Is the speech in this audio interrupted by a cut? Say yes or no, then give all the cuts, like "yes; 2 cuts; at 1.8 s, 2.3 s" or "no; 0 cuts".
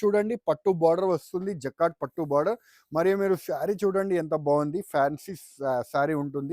no; 0 cuts